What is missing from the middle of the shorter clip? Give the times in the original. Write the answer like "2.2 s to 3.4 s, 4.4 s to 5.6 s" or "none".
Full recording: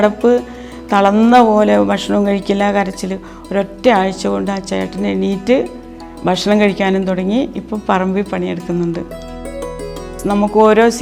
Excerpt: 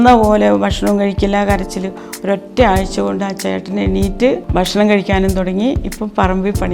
5.7 s to 6.2 s